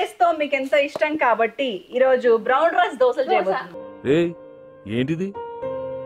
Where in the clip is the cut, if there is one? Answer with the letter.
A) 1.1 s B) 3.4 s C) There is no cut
C